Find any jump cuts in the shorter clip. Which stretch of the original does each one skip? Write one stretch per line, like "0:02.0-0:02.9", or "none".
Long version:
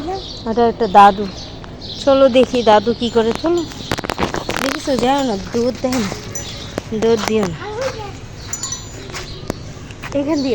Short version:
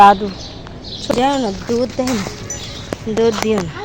0:02.1-0:04.9